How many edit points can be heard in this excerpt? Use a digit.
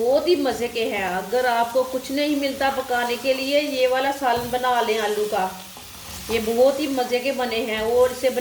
0